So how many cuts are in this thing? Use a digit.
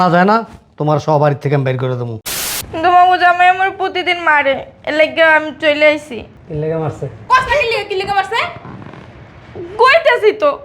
1